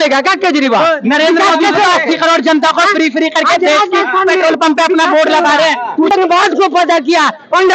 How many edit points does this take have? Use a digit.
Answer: 1